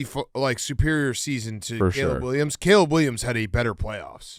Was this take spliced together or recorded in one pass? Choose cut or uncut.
uncut